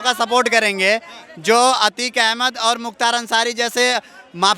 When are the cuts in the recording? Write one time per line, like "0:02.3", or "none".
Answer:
none